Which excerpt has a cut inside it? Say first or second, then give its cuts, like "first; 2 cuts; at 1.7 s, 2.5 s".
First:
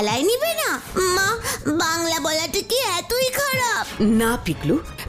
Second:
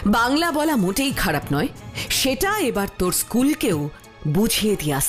first; 2 cuts; at 0.8 s, 3.9 s